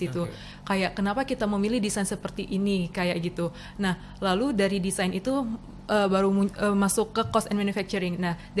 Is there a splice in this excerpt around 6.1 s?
no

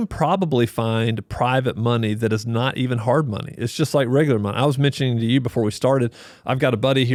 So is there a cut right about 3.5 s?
no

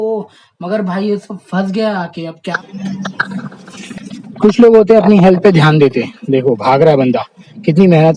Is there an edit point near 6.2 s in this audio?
no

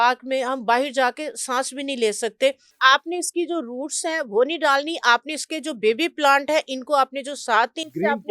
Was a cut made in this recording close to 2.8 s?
yes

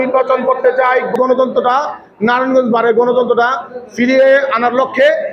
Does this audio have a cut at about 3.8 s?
no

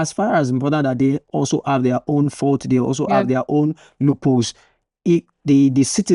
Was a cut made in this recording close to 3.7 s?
no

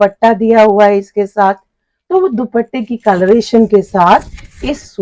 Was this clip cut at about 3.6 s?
no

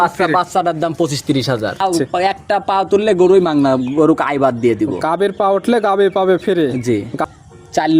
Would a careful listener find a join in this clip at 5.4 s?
no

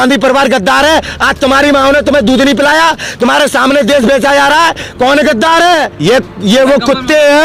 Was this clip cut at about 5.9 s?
yes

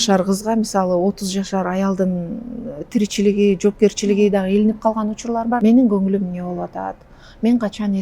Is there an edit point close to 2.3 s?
no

